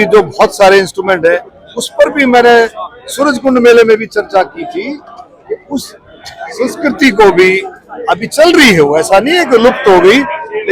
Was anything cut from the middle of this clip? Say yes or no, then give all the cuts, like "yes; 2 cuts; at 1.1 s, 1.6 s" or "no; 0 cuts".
no; 0 cuts